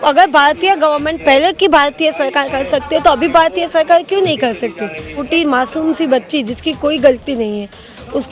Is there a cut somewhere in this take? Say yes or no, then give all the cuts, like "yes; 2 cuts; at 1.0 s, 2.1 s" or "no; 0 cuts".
yes; 1 cut; at 5.1 s